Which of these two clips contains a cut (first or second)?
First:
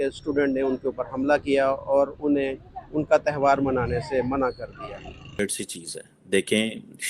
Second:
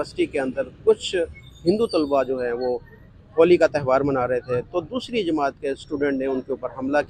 first